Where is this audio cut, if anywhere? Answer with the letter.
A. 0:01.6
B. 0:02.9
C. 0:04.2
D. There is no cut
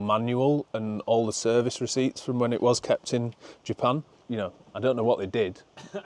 C